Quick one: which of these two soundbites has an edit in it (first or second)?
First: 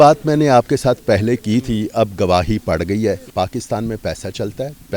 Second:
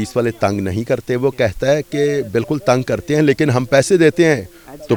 first